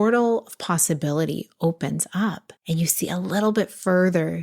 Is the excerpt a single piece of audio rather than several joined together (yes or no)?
no